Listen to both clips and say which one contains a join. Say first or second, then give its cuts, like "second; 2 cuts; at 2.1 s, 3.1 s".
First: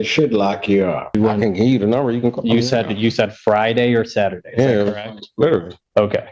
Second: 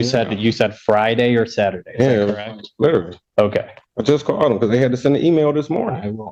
first; 1 cut; at 1.2 s